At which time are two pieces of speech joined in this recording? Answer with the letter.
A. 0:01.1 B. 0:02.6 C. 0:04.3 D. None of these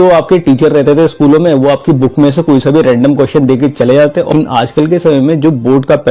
C